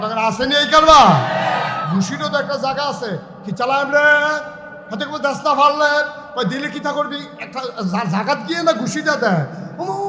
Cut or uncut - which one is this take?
uncut